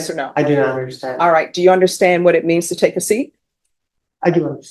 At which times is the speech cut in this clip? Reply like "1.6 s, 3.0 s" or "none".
none